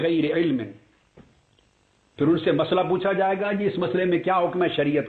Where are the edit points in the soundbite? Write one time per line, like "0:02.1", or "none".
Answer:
0:00.9